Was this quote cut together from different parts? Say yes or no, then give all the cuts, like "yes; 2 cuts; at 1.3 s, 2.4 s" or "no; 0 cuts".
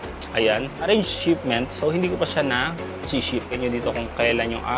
yes; 1 cut; at 3.6 s